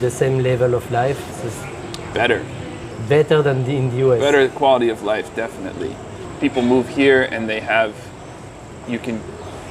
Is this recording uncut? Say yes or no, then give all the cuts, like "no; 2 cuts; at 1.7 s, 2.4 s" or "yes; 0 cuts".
yes; 0 cuts